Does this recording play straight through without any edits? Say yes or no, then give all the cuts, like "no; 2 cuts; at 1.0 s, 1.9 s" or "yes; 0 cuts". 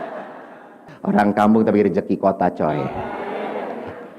no; 1 cut; at 0.9 s